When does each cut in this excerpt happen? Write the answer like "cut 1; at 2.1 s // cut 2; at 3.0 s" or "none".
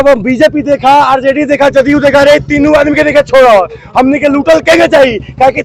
none